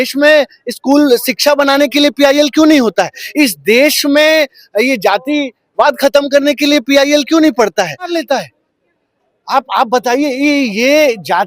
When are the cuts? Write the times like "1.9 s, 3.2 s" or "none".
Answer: 8.1 s